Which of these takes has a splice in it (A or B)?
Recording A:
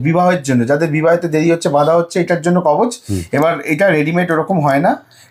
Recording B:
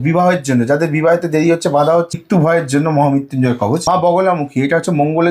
B